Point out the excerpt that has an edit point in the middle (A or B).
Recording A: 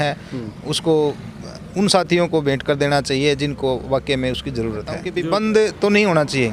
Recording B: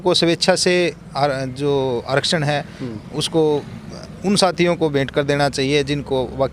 A